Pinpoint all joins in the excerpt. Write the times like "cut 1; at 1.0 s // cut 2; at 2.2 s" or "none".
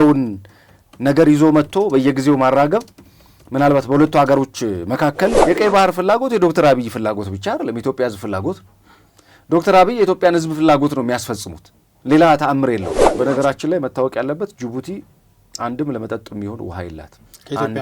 cut 1; at 5.4 s // cut 2; at 13.0 s